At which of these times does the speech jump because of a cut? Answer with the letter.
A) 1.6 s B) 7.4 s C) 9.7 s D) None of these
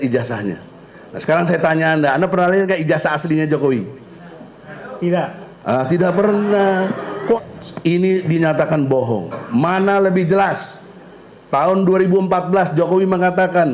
B